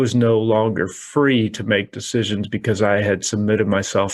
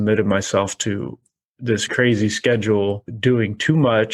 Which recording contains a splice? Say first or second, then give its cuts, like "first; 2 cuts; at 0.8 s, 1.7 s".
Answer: second; 2 cuts; at 1.9 s, 3.1 s